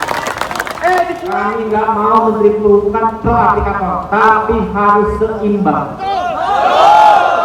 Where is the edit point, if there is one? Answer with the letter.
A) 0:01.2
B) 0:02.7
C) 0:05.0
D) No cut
A